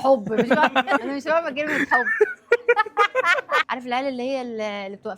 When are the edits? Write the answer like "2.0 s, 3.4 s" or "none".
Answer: 1.0 s, 3.6 s